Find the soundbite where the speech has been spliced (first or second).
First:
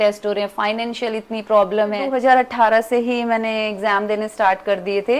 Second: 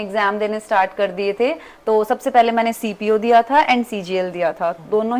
first